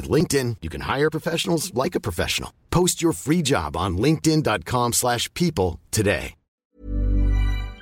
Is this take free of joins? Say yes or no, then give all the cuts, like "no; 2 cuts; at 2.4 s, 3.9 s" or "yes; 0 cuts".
no; 1 cut; at 6.7 s